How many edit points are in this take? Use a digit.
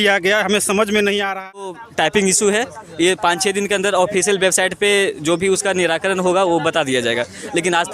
1